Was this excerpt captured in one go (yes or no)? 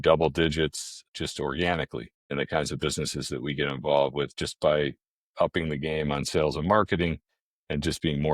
no